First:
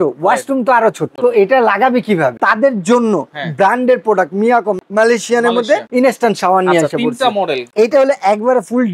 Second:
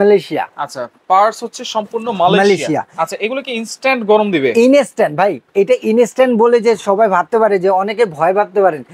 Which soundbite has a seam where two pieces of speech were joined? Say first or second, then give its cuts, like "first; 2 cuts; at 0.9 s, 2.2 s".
first; 5 cuts; at 1.1 s, 2.4 s, 4.8 s, 5.9 s, 7.7 s